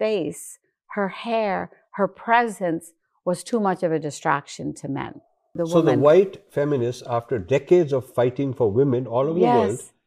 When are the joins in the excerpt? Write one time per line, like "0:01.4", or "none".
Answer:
0:05.6